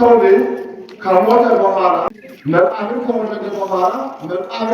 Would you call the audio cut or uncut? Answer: cut